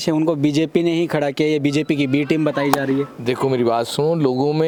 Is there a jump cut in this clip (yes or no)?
no